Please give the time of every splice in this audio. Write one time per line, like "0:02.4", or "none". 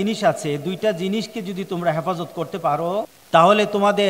0:03.2